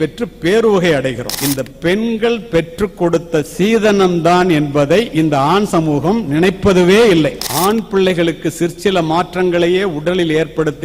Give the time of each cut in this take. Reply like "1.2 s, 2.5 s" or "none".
1.3 s, 7.4 s